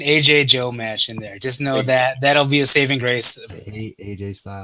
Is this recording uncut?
no; 1 cut; at 3.4 s

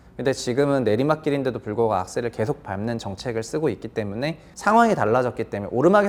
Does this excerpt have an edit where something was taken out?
no; 0 cuts

